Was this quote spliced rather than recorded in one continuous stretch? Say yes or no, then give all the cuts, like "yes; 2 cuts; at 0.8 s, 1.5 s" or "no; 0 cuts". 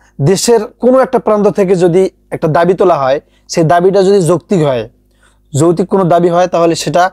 no; 0 cuts